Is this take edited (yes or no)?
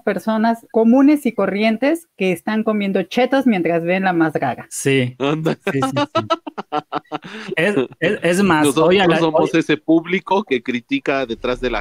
no